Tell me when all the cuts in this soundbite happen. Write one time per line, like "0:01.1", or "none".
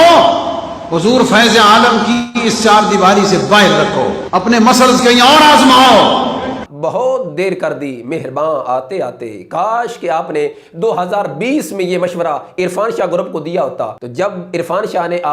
0:06.7
0:13.9